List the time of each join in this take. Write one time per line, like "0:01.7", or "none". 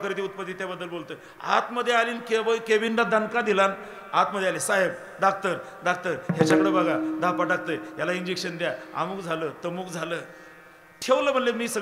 none